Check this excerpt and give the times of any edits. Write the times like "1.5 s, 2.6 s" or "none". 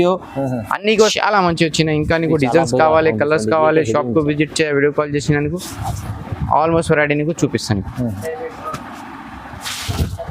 1.1 s